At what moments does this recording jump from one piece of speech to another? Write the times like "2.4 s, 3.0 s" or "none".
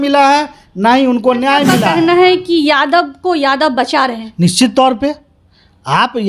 1.8 s